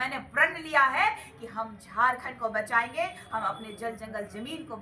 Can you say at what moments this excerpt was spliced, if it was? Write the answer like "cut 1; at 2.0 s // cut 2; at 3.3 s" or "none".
none